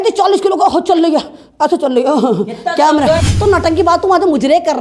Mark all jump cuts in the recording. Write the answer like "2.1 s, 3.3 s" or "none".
3.3 s